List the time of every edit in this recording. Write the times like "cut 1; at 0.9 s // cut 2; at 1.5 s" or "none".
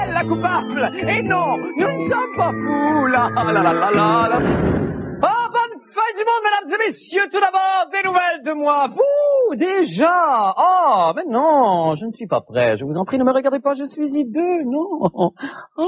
none